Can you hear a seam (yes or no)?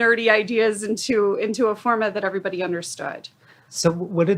no